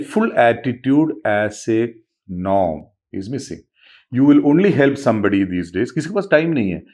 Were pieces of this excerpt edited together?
no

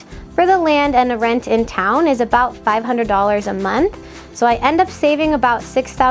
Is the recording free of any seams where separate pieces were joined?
yes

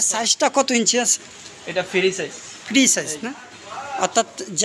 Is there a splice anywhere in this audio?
no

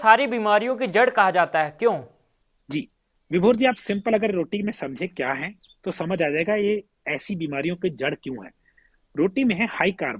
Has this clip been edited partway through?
no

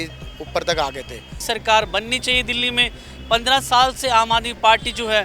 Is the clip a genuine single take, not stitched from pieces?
yes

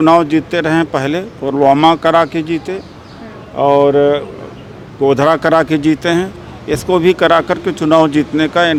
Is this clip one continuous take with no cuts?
yes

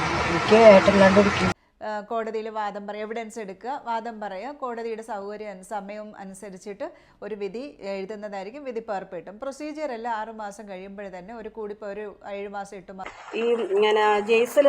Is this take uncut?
no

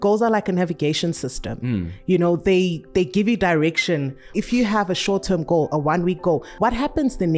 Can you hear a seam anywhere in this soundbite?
yes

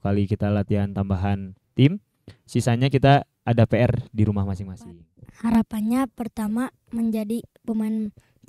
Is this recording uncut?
no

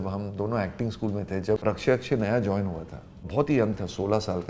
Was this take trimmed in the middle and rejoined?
yes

